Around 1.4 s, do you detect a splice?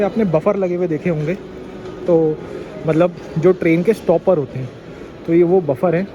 no; 0 cuts

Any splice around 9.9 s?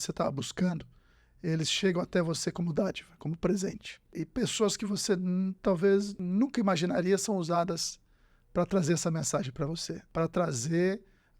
yes; 3 cuts; at 4.2 s, 6.2 s, 9.9 s

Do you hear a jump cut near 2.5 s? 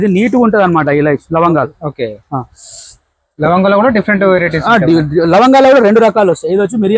no; 0 cuts

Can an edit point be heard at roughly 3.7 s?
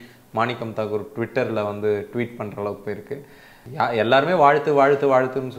yes; 1 cut; at 3.7 s

